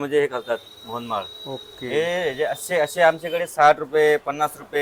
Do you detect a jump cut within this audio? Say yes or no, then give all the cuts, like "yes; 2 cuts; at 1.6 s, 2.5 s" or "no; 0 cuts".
no; 0 cuts